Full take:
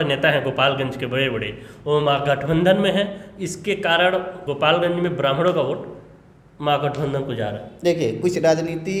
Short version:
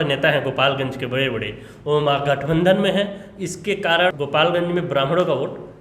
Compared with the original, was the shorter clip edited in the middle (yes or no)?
yes